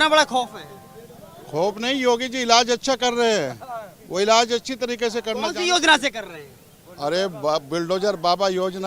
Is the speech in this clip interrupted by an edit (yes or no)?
no